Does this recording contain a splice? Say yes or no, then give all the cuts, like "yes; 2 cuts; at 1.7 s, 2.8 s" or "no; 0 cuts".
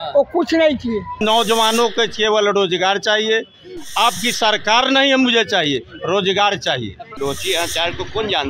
yes; 2 cuts; at 1.2 s, 7.0 s